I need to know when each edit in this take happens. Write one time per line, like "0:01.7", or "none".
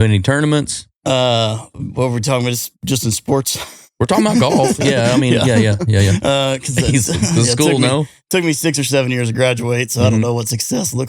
none